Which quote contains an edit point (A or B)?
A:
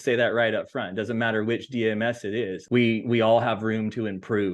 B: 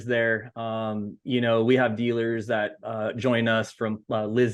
A